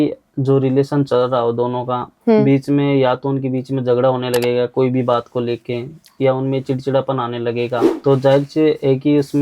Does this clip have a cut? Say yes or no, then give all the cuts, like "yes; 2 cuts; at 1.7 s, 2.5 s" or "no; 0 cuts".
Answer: yes; 1 cut; at 7.9 s